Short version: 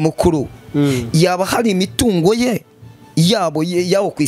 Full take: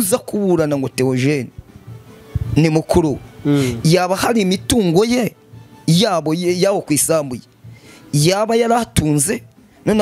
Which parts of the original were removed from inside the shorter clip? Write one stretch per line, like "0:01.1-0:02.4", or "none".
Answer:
none